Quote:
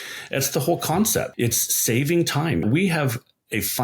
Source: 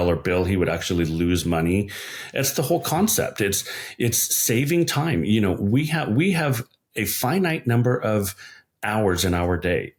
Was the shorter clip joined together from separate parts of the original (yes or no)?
yes